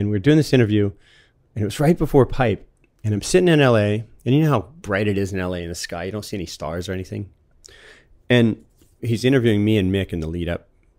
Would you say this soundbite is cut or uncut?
cut